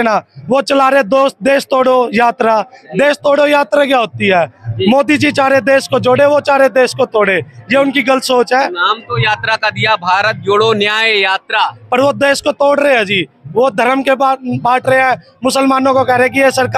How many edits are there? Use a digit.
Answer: 0